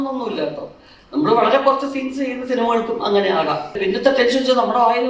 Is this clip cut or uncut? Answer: cut